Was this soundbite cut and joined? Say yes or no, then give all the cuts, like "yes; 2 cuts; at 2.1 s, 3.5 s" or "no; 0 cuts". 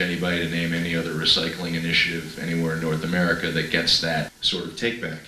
yes; 1 cut; at 4.4 s